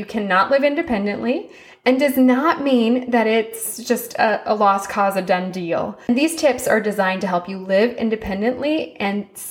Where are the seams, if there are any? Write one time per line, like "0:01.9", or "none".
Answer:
0:06.1

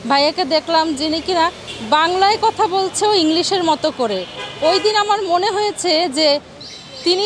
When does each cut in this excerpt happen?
none

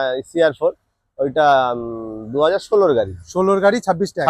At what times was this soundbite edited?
none

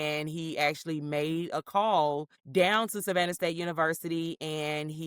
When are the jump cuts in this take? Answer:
0:02.3

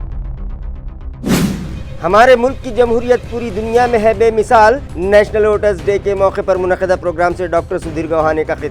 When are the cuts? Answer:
0:01.6

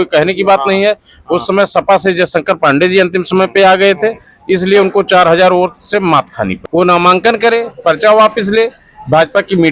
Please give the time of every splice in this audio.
0:06.6

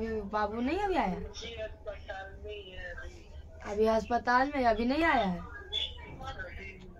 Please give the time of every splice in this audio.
none

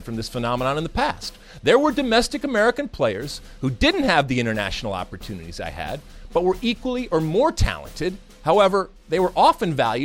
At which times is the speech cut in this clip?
none

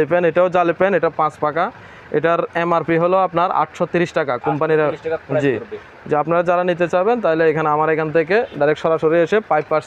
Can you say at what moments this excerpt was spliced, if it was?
none

